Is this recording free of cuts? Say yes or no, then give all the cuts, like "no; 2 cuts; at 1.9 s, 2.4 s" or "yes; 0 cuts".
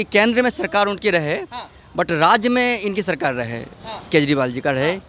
yes; 0 cuts